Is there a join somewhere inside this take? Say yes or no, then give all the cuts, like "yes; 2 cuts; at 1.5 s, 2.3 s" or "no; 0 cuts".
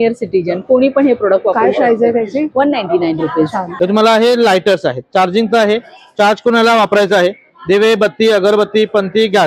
yes; 1 cut; at 3.6 s